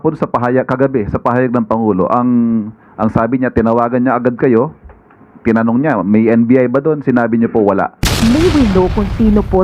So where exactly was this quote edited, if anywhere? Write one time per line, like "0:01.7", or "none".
0:08.2